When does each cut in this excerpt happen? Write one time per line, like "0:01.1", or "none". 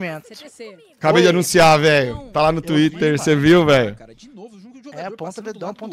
none